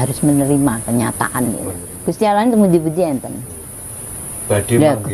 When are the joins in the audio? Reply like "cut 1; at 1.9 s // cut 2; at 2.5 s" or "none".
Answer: cut 1; at 1.8 s